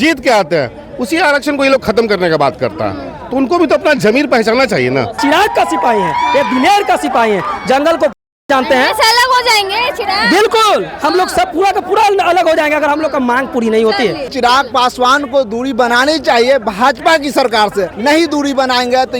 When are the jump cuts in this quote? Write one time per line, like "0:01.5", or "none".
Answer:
0:05.2
0:14.3
0:17.9